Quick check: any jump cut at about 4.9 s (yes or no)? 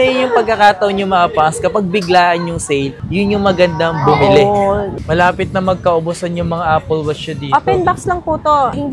yes